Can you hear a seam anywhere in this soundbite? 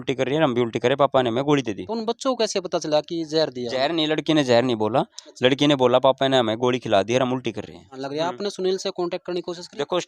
yes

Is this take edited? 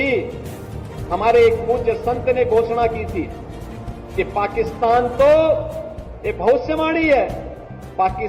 no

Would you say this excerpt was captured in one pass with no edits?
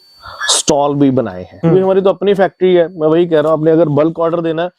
no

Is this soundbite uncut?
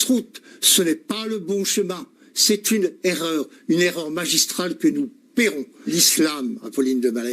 no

